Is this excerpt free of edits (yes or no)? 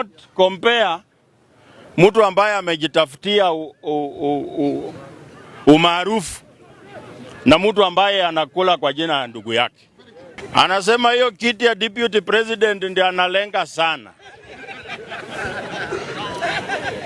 no